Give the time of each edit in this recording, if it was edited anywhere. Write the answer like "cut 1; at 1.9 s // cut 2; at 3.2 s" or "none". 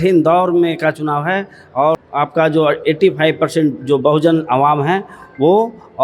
cut 1; at 2.0 s